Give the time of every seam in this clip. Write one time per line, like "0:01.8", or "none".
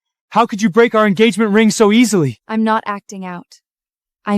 0:02.4

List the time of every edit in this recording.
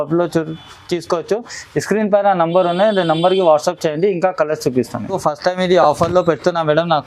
0:05.2

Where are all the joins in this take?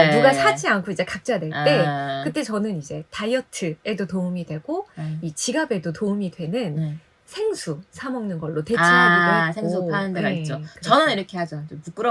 none

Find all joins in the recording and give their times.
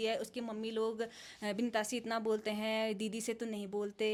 none

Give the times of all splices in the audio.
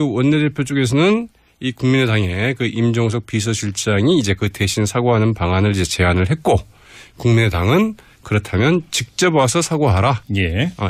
none

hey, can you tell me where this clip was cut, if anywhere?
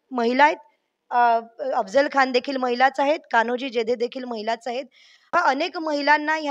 0:05.3

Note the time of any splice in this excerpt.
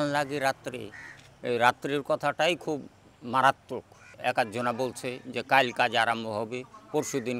0:04.0

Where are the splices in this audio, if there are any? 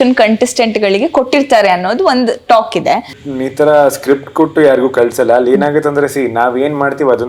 0:03.2

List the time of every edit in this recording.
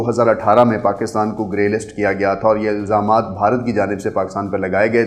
none

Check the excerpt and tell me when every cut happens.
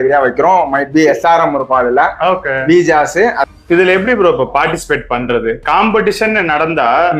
0:03.4

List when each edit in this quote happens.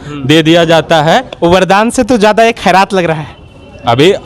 none

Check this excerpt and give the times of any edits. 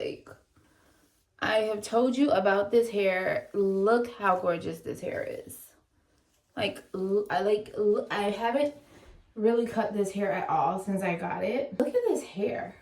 0:11.8

